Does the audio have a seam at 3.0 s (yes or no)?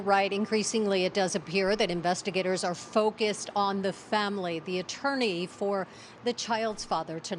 yes